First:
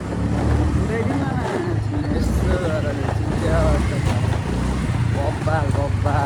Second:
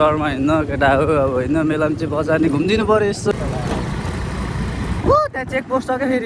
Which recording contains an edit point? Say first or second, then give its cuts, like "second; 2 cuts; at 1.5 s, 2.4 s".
second; 1 cut; at 3.3 s